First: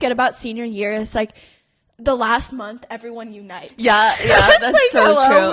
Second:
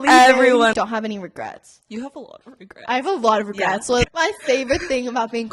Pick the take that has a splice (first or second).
second